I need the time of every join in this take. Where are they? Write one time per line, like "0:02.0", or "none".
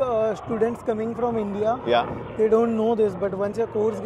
none